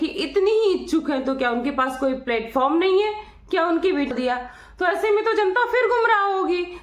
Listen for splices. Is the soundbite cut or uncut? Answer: cut